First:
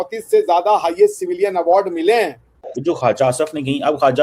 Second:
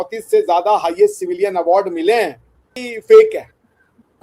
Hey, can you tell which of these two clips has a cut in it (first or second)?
first